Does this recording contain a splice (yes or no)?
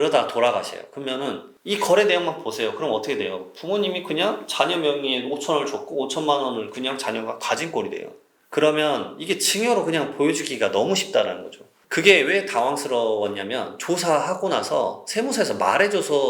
no